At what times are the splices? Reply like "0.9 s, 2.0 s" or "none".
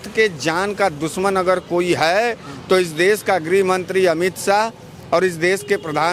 none